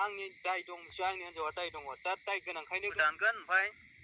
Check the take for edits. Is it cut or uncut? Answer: cut